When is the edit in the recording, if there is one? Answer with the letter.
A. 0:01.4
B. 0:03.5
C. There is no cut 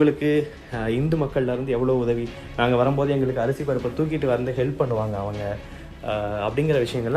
C